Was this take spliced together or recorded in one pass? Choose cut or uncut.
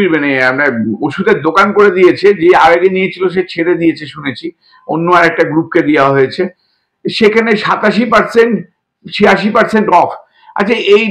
uncut